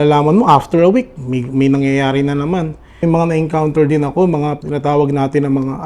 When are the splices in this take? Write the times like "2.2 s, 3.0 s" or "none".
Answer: 3.0 s, 4.6 s